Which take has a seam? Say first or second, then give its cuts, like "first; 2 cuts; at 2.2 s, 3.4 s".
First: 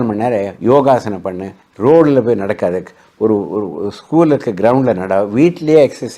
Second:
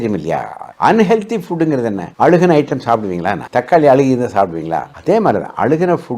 second; 2 cuts; at 2.0 s, 3.4 s